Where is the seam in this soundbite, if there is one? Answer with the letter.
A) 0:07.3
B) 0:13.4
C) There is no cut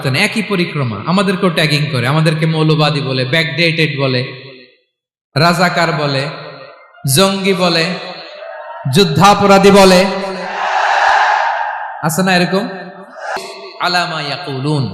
B